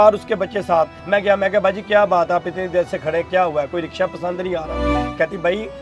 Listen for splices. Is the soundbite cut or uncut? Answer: cut